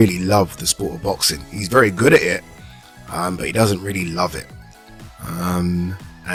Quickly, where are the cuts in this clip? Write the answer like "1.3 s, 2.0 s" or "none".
none